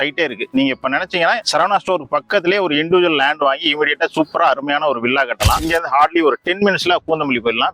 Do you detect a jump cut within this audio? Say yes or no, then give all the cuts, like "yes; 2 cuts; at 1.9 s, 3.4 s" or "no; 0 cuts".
yes; 1 cut; at 5.6 s